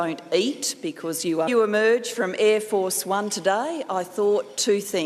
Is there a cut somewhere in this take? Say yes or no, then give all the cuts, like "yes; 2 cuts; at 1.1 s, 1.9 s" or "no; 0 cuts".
no; 0 cuts